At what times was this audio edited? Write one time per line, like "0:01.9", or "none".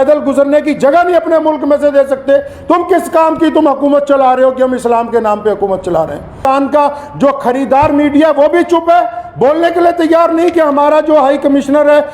0:06.4

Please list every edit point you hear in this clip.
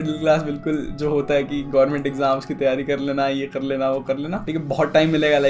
0:04.4

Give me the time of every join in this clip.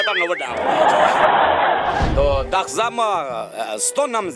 0:02.1

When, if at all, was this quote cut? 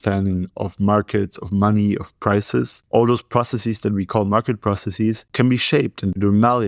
0:02.8
0:05.2

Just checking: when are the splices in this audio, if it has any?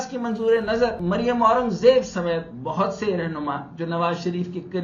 none

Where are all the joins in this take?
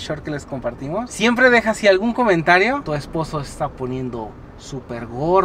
0:01.1
0:02.8

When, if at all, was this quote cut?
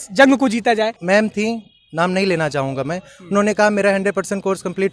0:01.0

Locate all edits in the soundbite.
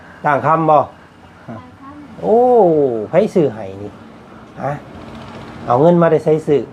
none

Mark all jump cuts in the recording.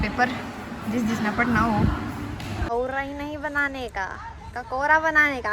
0:02.7

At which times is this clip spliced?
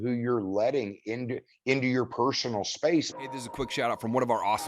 0:03.1

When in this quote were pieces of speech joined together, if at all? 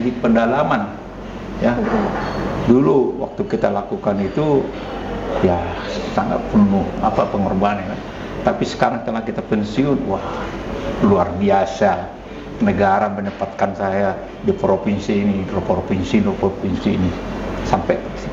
none

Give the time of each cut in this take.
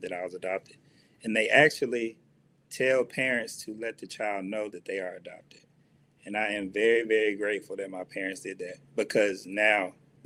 none

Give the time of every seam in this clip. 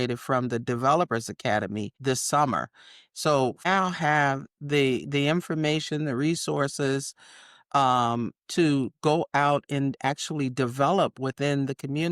0:01.9
0:03.7

